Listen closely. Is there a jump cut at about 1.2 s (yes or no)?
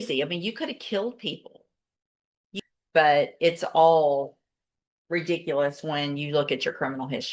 no